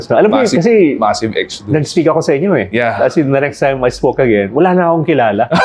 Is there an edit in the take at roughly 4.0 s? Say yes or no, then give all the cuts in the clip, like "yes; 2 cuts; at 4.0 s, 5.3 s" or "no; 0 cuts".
no; 1 cut; at 2.7 s